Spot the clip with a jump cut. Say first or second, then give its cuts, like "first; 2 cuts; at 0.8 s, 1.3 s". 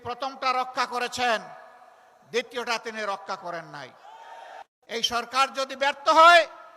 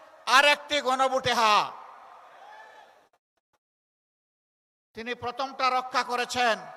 first; 1 cut; at 4.6 s